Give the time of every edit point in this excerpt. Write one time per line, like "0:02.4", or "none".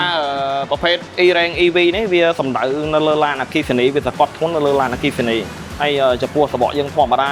none